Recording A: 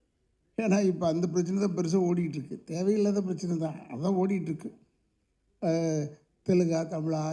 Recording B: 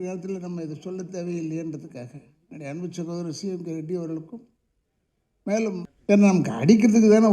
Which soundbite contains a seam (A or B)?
B